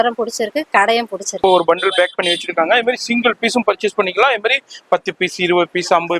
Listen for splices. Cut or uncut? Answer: cut